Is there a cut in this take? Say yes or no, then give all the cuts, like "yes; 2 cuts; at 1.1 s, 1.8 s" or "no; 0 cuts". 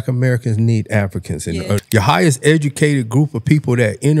yes; 1 cut; at 1.8 s